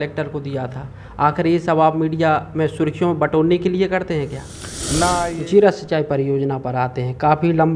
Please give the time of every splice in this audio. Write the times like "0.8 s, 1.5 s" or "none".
5.3 s